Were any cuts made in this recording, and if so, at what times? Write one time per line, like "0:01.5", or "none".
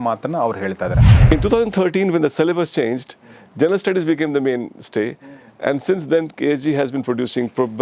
0:01.1